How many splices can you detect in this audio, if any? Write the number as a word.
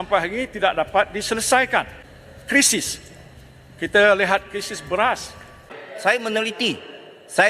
one